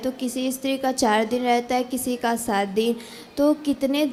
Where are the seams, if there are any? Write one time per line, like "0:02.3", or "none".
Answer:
none